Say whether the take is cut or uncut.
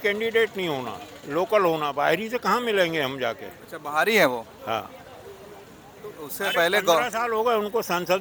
uncut